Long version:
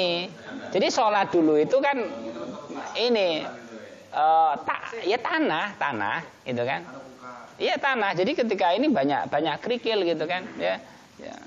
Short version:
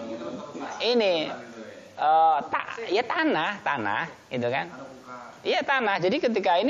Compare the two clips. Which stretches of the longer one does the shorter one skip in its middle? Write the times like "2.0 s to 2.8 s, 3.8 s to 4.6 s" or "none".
none